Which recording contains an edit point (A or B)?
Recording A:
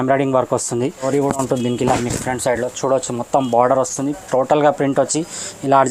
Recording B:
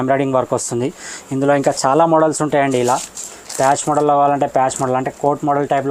A